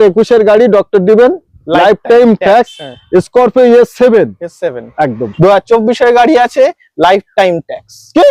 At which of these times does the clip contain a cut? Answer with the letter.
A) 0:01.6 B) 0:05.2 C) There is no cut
B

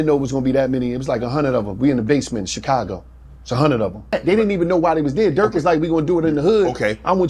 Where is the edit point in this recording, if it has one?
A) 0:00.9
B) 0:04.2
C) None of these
B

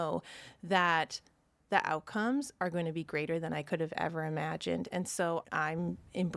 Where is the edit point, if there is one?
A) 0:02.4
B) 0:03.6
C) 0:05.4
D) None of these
C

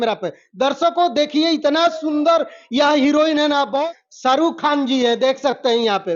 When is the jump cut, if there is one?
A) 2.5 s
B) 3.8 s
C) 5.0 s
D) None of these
B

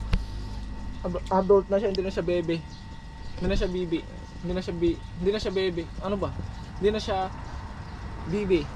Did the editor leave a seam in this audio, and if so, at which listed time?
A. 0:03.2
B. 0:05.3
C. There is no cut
C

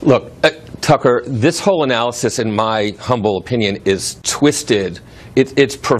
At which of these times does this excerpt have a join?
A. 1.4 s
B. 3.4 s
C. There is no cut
B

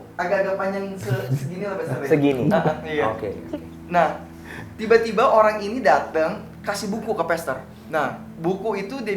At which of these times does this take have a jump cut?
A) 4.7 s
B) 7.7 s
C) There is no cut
B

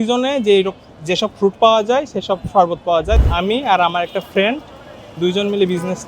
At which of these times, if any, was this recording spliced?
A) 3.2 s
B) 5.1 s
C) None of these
A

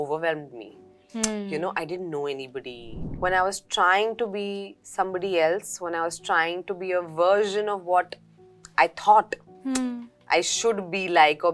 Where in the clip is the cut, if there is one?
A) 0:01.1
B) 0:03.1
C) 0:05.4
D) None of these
B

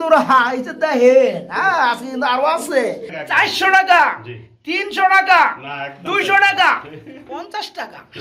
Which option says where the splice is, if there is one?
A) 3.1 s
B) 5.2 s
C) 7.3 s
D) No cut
A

